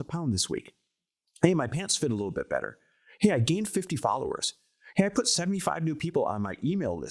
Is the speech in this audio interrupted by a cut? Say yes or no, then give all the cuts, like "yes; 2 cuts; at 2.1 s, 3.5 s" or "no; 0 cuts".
no; 0 cuts